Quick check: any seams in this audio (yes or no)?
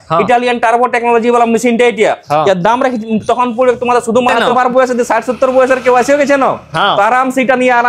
yes